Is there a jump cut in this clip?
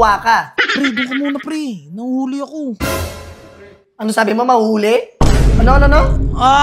no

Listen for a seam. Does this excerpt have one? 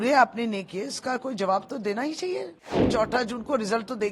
yes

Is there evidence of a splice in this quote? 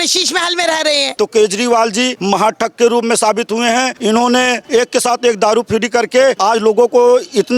yes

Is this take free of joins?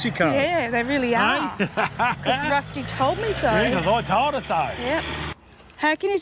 no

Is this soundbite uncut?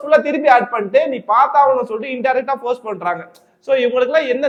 yes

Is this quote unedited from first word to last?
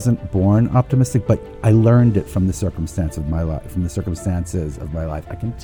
no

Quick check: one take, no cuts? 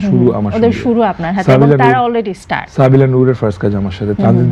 yes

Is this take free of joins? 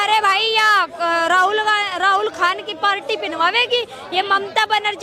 yes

